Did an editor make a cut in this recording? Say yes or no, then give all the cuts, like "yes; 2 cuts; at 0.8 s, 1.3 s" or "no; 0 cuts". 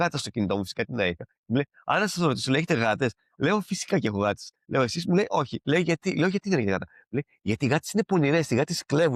no; 0 cuts